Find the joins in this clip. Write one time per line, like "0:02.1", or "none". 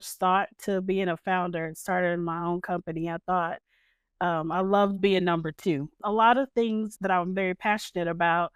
0:06.0
0:06.9